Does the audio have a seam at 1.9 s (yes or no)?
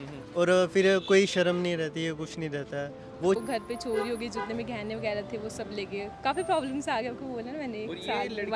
no